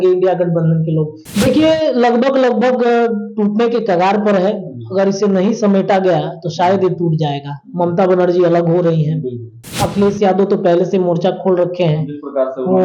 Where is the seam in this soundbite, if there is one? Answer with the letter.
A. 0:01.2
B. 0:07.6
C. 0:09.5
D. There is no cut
A